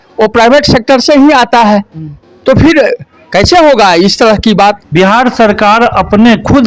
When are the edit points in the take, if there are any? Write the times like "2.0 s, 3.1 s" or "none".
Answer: 4.8 s